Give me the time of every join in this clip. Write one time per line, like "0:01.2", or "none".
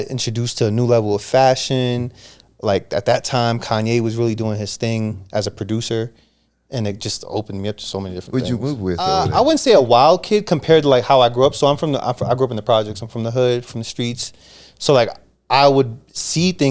0:09.1